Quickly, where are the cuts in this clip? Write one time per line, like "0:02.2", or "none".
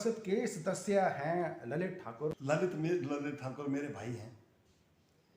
0:02.0